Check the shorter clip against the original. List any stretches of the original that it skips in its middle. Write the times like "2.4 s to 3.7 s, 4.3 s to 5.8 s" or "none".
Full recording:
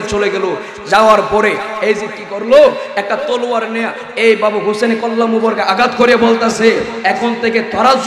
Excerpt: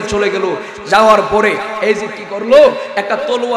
none